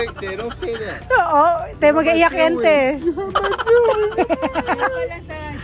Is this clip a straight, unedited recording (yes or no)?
yes